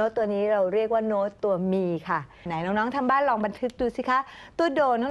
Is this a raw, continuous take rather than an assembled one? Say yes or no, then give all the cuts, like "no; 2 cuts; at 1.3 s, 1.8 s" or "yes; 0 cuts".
no; 1 cut; at 2.7 s